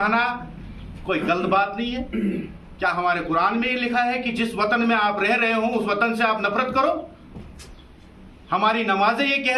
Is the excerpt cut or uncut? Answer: uncut